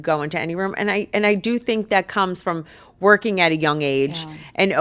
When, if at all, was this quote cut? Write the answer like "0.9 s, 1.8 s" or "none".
none

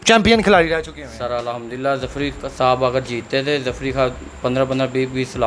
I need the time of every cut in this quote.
none

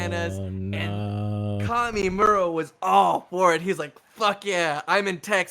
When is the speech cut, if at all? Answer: none

